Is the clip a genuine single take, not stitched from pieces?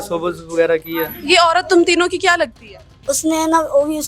no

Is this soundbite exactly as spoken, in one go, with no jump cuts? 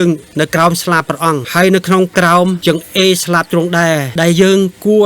no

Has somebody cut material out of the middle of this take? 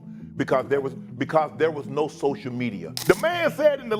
yes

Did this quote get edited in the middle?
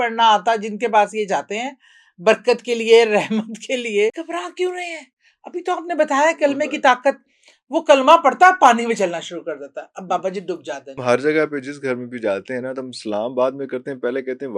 yes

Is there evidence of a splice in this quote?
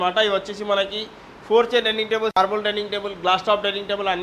yes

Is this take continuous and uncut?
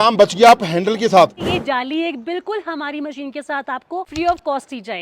no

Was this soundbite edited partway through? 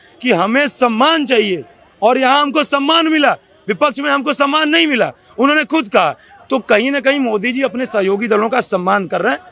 no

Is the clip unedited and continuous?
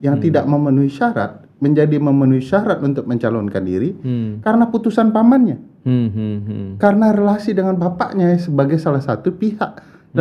yes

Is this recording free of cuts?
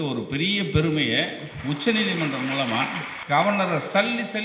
no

